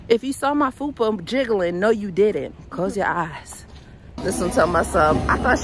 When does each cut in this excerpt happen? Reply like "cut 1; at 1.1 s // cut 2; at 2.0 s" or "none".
cut 1; at 3.9 s

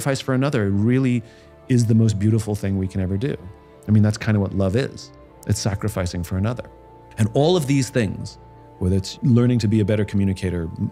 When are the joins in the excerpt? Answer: none

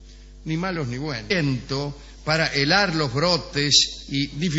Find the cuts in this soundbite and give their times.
none

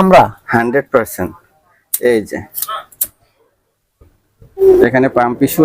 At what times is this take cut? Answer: cut 1; at 4.6 s

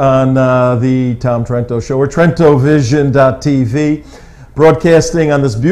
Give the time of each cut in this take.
none

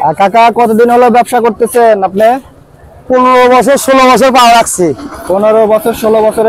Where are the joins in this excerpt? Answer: none

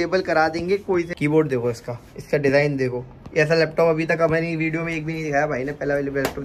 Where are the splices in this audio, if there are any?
cut 1; at 1.1 s

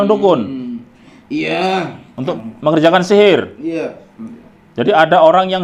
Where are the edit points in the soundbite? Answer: cut 1; at 2.4 s

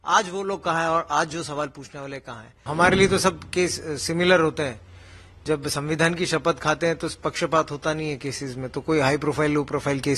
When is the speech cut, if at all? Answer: cut 1; at 2.6 s

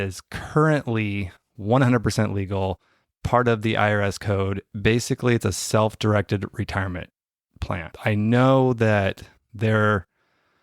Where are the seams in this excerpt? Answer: cut 1; at 4.6 s // cut 2; at 7.9 s

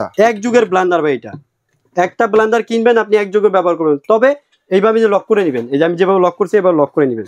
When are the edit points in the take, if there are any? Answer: none

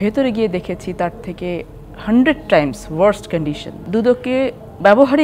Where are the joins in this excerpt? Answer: cut 1; at 3.7 s

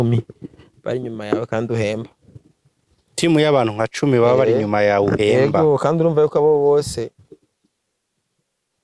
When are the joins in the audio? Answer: none

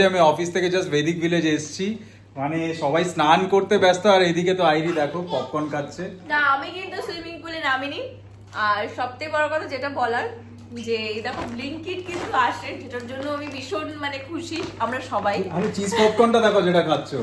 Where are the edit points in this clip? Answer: none

